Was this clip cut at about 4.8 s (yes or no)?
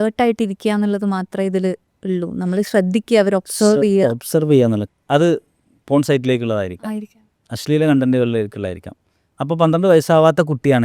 yes